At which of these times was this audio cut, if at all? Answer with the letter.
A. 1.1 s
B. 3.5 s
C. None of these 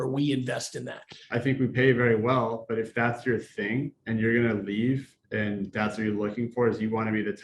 A